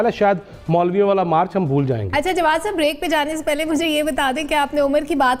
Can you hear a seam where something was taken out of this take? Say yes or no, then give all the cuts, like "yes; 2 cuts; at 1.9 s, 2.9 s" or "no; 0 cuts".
no; 0 cuts